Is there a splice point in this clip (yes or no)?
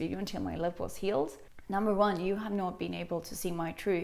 yes